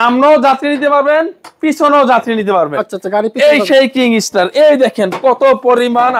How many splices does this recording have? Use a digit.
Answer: 0